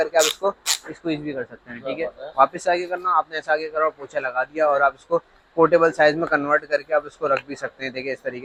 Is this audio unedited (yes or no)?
yes